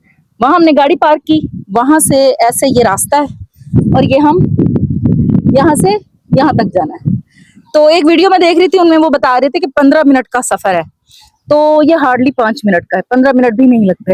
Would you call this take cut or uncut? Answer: uncut